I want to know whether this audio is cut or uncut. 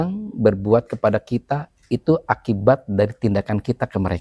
uncut